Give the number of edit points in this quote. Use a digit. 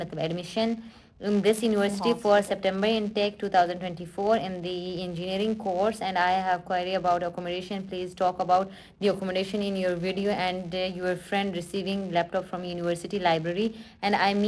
0